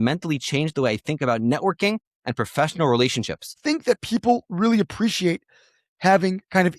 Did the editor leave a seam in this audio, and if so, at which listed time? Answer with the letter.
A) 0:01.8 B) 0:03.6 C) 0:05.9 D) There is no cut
B